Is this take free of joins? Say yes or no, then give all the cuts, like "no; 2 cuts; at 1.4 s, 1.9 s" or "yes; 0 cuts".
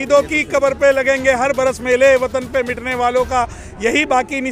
yes; 0 cuts